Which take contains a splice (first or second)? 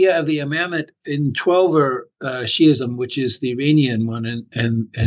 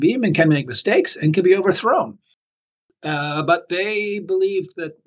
second